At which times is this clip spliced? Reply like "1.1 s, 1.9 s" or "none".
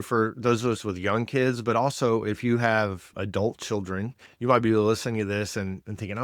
3.1 s